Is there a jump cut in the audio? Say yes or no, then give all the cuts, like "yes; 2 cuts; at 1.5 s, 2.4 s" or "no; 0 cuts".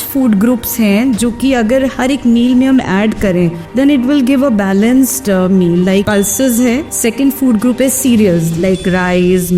yes; 3 cuts; at 3.6 s, 6.1 s, 6.9 s